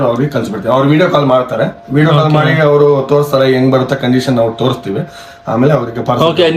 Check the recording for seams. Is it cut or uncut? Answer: uncut